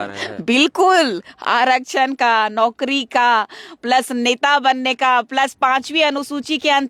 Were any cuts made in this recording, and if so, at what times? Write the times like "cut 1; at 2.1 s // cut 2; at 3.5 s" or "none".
none